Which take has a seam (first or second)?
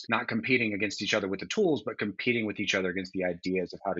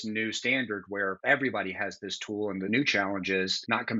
second